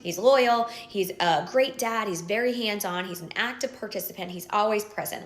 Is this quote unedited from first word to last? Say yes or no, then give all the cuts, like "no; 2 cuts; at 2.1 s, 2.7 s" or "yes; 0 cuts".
no; 2 cuts; at 3.1 s, 4.3 s